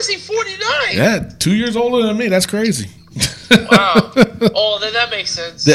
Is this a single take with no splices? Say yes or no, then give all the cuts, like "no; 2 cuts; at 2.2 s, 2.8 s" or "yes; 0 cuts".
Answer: yes; 0 cuts